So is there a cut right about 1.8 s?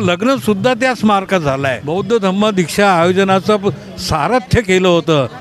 yes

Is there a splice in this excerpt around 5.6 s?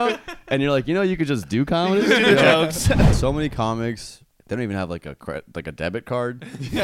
no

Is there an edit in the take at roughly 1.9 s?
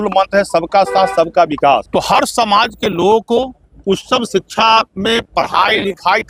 yes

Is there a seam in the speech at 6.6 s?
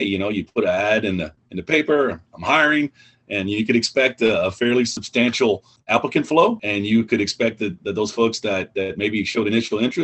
yes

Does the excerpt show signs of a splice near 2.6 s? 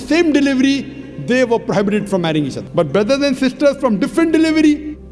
yes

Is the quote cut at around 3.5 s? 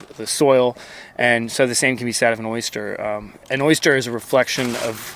yes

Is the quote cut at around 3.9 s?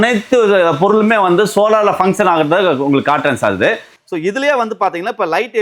yes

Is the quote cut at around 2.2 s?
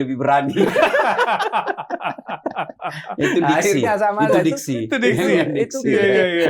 no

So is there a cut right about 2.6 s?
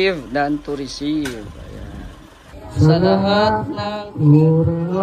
yes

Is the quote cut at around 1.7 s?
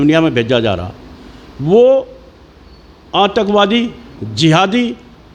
yes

